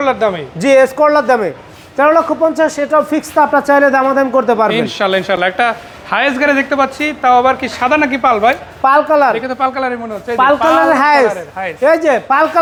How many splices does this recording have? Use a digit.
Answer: 0